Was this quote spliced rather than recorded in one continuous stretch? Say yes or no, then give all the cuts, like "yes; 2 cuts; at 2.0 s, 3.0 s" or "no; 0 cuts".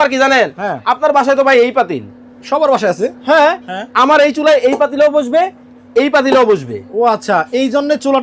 no; 0 cuts